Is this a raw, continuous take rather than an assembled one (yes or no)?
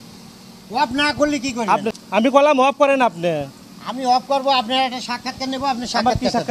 no